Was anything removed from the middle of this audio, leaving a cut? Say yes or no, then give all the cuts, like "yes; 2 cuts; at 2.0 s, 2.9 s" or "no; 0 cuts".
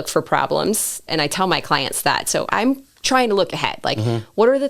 yes; 2 cuts; at 1.0 s, 2.5 s